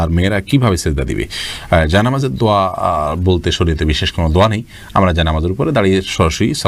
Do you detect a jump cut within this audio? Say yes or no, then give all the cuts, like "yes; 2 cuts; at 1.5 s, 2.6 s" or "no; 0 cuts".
no; 0 cuts